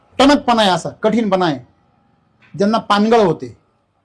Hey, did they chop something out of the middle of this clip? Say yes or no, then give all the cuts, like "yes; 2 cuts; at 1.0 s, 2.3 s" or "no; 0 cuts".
no; 0 cuts